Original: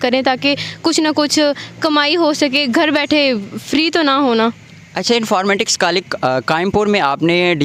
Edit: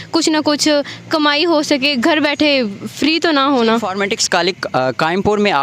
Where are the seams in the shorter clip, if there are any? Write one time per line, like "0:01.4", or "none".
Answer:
0:03.9